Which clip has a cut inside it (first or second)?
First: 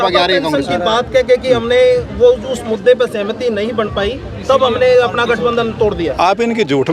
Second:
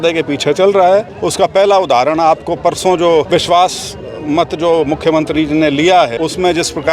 second